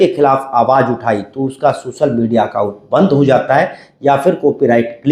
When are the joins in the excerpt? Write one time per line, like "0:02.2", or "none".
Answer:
none